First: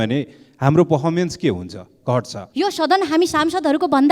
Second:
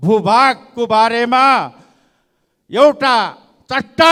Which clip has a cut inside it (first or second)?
first